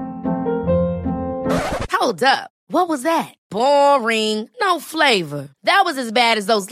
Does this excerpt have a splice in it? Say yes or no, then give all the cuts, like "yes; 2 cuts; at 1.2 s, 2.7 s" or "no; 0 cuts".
no; 0 cuts